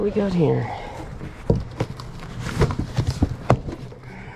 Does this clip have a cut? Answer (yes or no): no